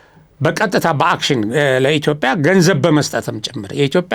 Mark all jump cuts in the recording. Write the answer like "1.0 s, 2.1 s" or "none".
none